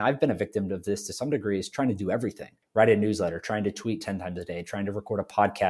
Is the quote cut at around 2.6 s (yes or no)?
yes